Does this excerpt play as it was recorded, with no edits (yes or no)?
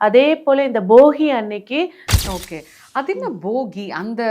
no